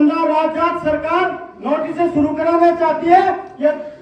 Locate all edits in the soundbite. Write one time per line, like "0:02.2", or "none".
none

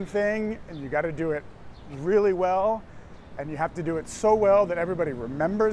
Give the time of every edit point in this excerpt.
none

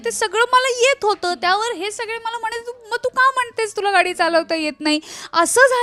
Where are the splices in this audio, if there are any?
none

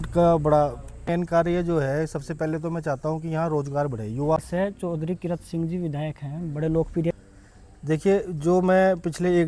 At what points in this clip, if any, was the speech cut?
0:01.1
0:04.4
0:07.1

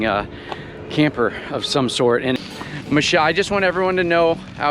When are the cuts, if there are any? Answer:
0:02.4

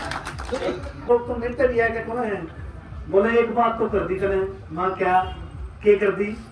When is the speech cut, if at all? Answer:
0:01.1

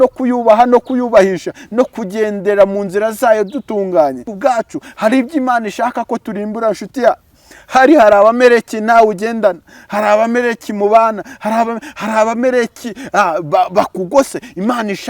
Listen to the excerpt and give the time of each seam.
0:04.3

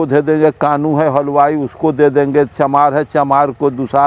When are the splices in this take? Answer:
none

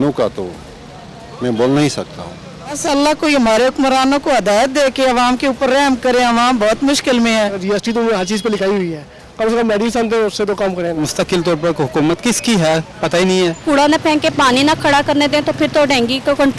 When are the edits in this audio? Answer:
0:02.8
0:07.6
0:11.0
0:13.6

